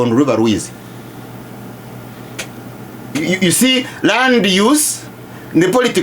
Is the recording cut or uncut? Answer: uncut